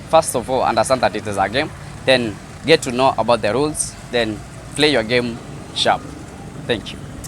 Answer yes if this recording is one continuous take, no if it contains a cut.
yes